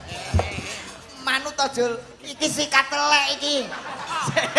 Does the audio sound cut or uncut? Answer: uncut